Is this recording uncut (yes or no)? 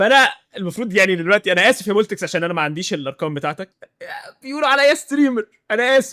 yes